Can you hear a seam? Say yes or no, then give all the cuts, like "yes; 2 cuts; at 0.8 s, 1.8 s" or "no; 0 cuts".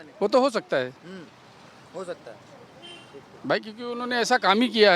no; 0 cuts